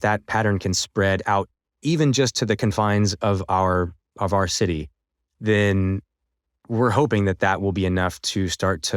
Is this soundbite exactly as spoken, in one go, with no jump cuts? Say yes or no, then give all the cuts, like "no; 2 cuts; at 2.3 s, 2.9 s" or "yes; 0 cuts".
no; 1 cut; at 1.8 s